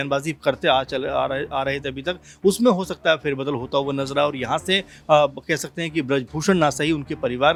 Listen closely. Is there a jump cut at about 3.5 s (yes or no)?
no